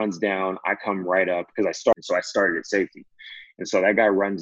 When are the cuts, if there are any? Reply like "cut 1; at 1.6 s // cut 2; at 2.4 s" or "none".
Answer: cut 1; at 1.9 s